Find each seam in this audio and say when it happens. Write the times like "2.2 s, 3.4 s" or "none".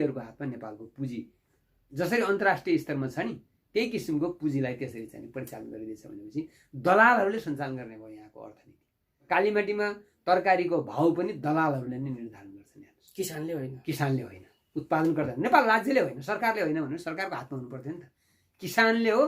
9.3 s